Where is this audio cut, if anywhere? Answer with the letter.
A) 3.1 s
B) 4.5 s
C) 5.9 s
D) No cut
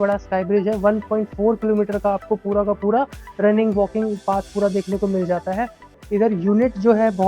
C